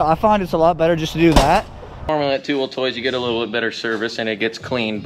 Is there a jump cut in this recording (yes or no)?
yes